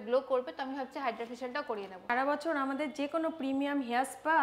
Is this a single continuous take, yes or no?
no